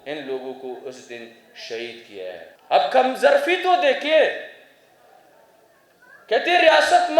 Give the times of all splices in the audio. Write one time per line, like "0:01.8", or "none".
0:02.5

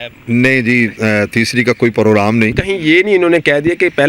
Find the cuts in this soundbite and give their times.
0:02.6

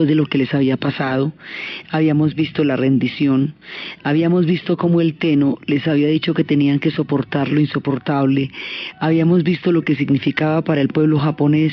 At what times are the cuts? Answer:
0:09.8

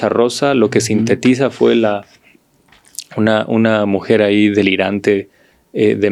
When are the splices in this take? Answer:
none

